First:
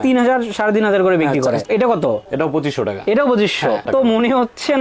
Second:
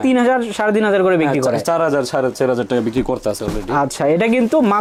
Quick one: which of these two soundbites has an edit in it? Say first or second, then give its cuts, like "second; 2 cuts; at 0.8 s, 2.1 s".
first; 2 cuts; at 1.6 s, 3.9 s